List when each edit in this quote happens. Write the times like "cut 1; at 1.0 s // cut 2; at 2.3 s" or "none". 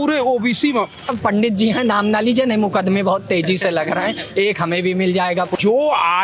cut 1; at 1.1 s // cut 2; at 5.5 s

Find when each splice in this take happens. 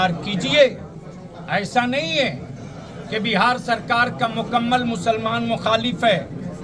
none

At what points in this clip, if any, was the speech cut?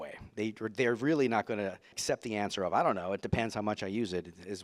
cut 1; at 1.9 s

